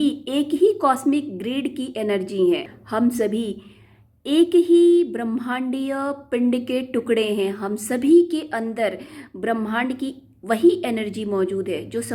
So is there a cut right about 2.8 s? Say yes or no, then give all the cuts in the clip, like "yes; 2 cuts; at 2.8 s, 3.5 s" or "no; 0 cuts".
yes; 1 cut; at 2.8 s